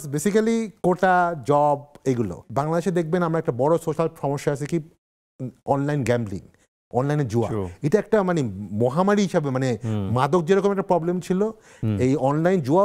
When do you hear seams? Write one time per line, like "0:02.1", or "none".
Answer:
0:02.4